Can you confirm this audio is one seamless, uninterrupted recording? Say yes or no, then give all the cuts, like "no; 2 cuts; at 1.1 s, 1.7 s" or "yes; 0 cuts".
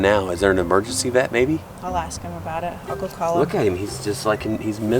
yes; 0 cuts